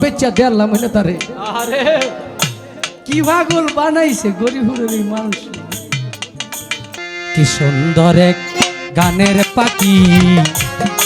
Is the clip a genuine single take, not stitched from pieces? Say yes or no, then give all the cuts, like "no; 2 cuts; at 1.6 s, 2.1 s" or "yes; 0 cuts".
no; 1 cut; at 7.0 s